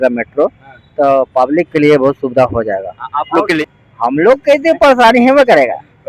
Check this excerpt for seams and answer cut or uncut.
cut